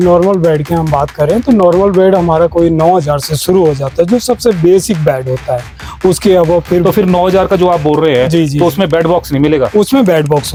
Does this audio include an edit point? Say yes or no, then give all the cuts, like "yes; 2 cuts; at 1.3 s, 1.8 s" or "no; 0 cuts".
no; 0 cuts